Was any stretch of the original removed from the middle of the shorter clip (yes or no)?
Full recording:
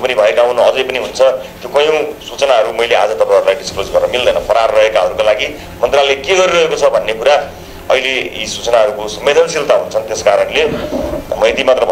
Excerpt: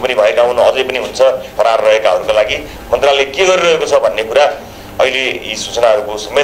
yes